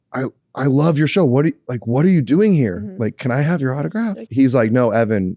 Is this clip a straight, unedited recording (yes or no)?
no